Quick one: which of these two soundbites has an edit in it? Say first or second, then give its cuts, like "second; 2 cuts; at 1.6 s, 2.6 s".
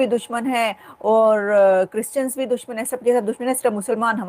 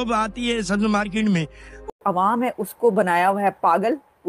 second; 1 cut; at 1.8 s